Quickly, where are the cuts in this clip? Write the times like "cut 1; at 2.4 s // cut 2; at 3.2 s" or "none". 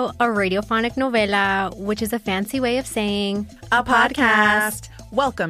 none